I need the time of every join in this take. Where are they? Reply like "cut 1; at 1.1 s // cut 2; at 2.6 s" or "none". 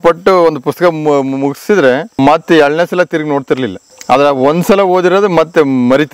cut 1; at 2.1 s // cut 2; at 3.9 s